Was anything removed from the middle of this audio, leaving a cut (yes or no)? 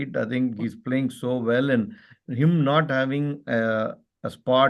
no